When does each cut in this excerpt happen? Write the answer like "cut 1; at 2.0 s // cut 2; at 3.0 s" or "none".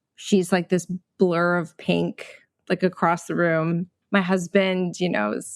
cut 1; at 3.9 s